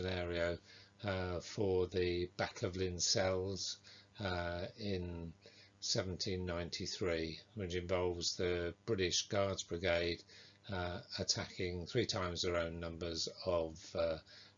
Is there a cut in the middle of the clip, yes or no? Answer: yes